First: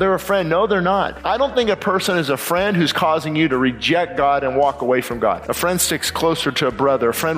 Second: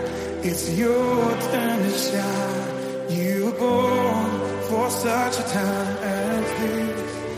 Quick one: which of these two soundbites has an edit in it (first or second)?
first